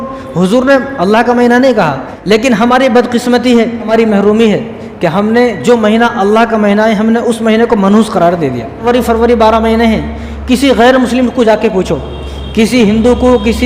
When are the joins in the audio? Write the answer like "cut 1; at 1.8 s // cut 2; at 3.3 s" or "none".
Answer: cut 1; at 2.1 s // cut 2; at 3.9 s // cut 3; at 8.8 s